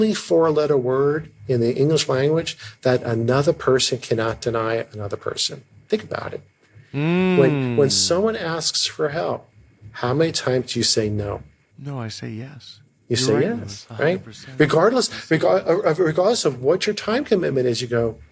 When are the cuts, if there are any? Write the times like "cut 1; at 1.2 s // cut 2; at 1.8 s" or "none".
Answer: cut 1; at 11.6 s